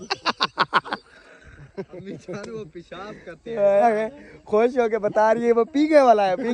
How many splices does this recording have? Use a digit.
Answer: 1